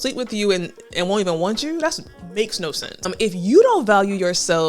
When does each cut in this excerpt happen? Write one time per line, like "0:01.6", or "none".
0:03.1